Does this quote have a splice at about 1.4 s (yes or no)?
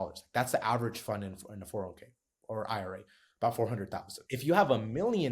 no